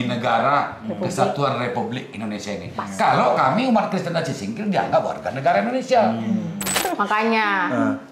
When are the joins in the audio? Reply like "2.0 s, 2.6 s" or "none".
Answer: 6.8 s